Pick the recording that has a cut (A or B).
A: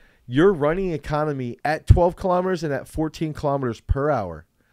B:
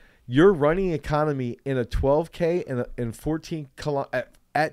A